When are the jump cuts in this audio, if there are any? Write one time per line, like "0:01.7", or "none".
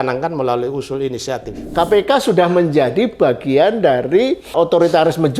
0:01.7
0:04.5